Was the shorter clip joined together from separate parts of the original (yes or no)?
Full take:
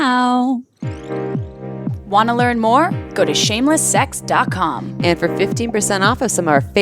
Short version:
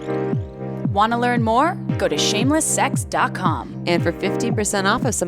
yes